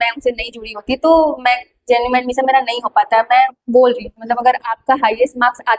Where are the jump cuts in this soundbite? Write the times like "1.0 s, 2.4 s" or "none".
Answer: 4.2 s

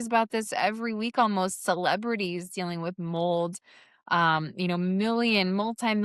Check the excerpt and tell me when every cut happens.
none

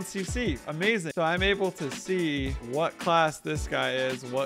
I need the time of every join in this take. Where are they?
1.1 s, 2.6 s

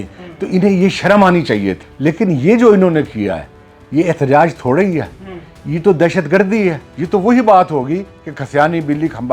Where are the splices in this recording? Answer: 1.8 s, 6.9 s

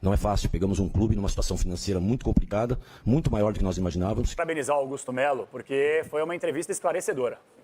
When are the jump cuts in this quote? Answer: 4.4 s

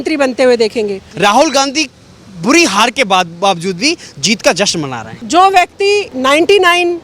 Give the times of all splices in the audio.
1.0 s, 5.2 s, 6.1 s

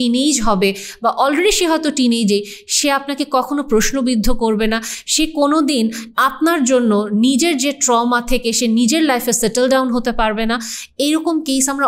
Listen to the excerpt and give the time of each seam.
none

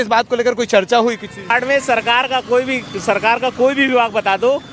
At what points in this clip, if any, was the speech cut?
1.5 s

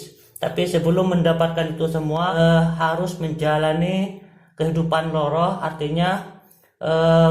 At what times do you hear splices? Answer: 2.3 s

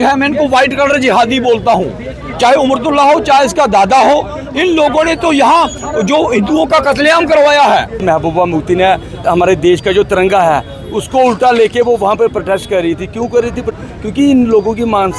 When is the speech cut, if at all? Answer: 8.0 s, 9.2 s, 13.7 s

